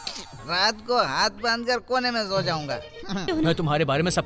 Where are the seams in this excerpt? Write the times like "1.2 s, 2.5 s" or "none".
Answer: 3.3 s